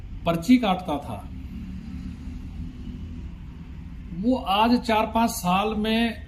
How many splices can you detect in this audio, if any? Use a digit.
0